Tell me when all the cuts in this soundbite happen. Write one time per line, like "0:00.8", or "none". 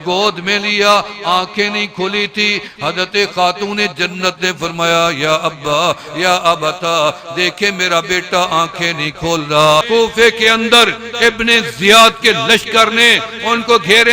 0:09.9